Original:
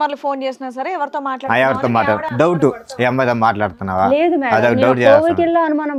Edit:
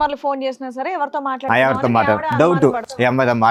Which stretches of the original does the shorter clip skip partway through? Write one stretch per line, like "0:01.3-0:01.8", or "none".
none